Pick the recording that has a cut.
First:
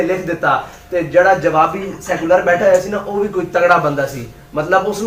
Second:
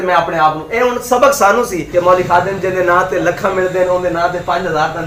second; 1 cut; at 1.8 s

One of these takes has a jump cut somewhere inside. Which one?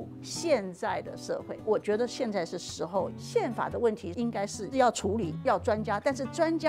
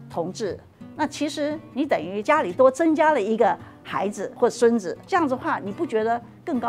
first; 1 cut; at 3.1 s

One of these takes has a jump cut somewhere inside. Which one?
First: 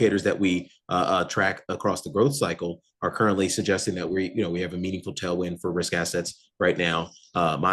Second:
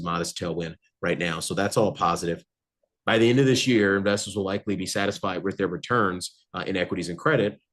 second; 1 cut; at 2.5 s

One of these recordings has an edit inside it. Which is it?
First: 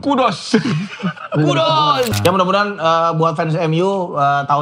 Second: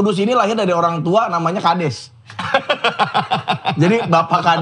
first; 1 cut; at 2.1 s

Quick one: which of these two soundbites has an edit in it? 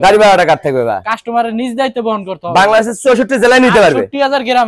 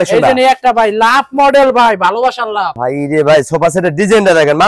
second; 1 cut; at 2.7 s

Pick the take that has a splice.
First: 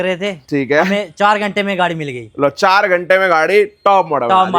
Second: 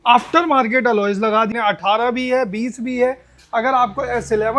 second; 1 cut; at 1.5 s

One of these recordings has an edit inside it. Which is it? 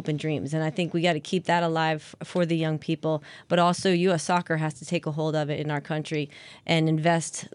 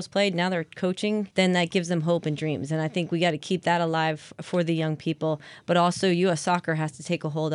second; 1 cut; at 1.3 s

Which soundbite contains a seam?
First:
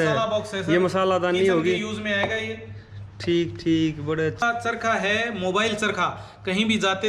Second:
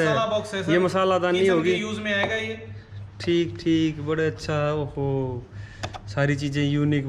first; 1 cut; at 4.4 s

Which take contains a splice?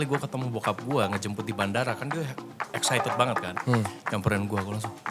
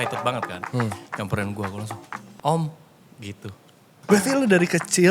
second; 1 cut; at 4.0 s

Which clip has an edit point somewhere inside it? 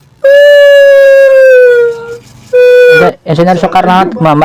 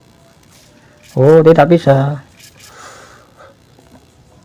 first; 1 cut; at 2.9 s

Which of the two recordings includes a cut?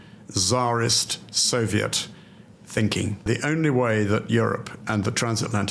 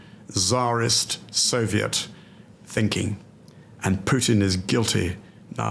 first; 1 cut; at 3.3 s

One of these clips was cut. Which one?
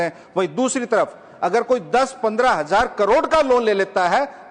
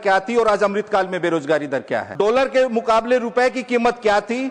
second; 1 cut; at 2.1 s

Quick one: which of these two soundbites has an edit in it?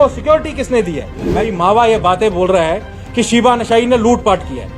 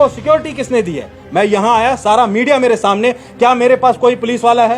first; 1 cut; at 1.5 s

